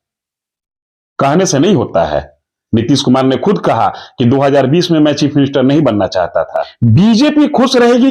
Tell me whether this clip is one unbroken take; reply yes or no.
no